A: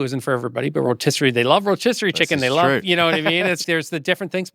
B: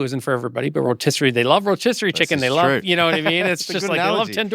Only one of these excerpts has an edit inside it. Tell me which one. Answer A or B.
A